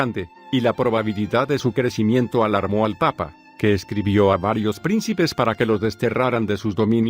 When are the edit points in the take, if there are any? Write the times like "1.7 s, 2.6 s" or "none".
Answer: 2.6 s